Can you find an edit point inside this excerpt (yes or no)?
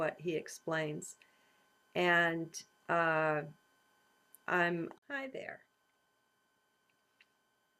no